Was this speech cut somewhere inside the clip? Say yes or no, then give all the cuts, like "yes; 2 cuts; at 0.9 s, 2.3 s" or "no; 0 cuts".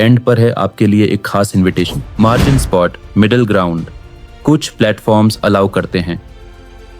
yes; 1 cut; at 2.0 s